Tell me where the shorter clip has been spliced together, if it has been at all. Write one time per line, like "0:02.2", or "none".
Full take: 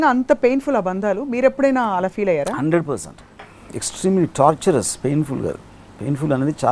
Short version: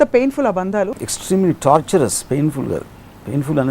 0:00.9